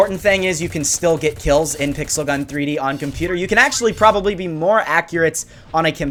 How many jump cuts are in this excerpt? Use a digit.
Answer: 0